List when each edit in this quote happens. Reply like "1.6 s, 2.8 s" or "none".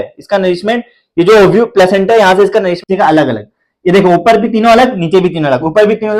2.8 s